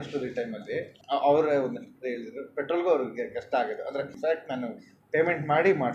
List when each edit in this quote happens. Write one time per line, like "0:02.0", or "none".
0:00.9
0:04.1